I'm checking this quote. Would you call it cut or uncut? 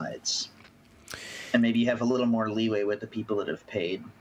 uncut